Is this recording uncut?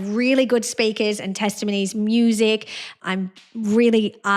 no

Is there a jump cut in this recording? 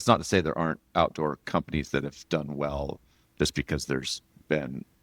no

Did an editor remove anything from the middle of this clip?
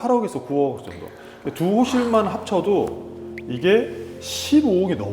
no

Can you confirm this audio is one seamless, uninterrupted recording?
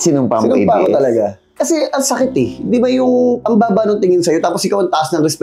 yes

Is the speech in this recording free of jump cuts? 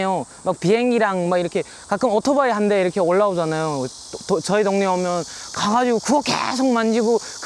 yes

